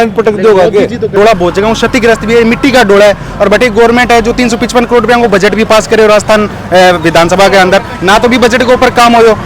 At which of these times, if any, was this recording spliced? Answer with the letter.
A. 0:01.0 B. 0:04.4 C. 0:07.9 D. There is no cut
A